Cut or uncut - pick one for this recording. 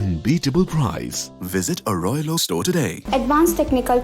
cut